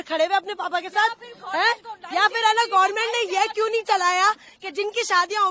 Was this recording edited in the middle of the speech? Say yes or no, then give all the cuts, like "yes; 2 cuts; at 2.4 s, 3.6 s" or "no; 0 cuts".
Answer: no; 0 cuts